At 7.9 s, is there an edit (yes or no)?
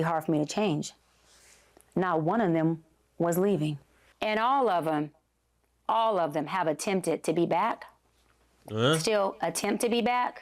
no